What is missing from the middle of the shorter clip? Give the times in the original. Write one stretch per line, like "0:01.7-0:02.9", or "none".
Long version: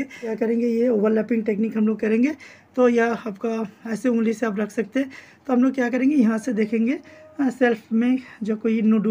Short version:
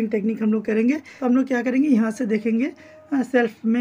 0:02.4-0:05.4